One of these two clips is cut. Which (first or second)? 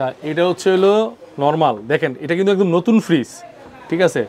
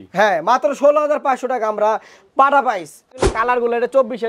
second